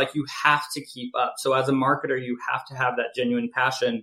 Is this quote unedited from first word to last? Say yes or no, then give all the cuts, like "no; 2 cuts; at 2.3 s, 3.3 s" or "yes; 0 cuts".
yes; 0 cuts